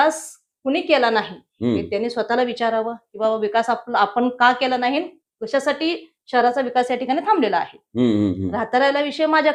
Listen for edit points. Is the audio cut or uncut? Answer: uncut